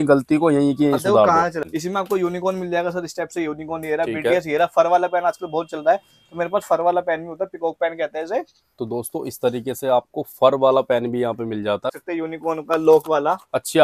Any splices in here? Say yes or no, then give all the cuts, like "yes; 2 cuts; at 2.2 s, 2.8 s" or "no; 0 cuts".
yes; 2 cuts; at 1.7 s, 12.0 s